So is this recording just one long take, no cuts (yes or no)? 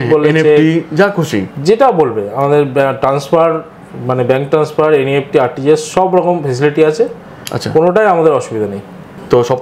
yes